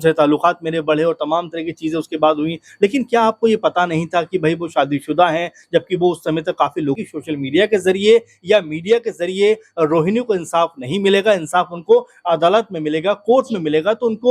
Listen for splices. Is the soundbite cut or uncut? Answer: cut